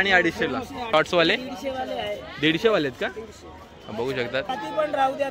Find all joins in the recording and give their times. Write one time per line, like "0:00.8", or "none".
0:00.9
0:04.5